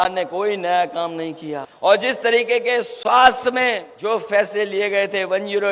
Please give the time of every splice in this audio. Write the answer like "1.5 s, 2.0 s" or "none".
1.7 s, 3.9 s